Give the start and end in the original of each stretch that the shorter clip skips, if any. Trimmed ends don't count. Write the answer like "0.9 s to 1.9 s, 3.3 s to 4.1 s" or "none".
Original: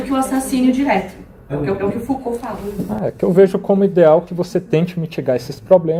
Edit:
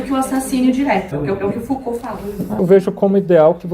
1.1 s to 1.5 s, 3.0 s to 3.3 s